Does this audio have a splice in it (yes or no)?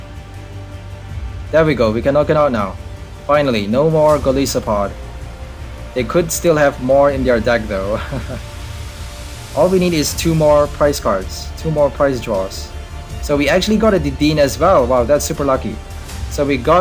no